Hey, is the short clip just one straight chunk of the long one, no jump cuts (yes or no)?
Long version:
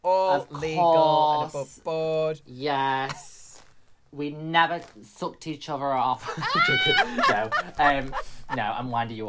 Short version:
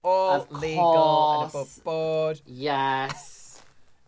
yes